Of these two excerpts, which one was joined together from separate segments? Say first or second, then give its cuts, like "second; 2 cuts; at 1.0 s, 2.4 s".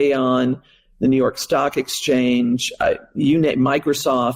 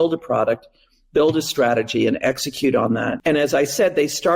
second; 1 cut; at 3.1 s